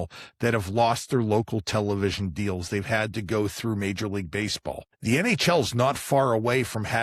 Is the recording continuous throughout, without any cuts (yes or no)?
no